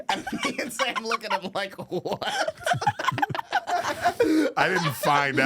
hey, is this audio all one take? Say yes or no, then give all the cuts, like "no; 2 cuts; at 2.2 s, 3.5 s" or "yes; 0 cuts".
no; 1 cut; at 3.6 s